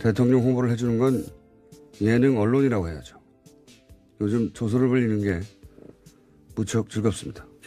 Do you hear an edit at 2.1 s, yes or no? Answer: no